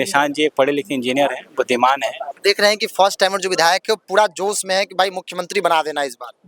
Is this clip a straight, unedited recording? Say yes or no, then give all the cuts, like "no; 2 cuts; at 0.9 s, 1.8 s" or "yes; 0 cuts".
no; 1 cut; at 2.4 s